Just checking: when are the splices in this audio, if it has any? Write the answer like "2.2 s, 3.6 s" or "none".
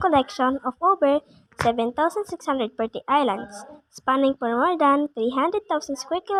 none